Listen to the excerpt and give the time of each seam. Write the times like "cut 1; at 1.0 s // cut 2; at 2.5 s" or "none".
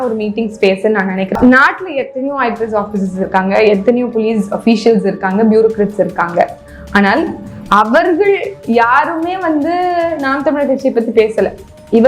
cut 1; at 1.3 s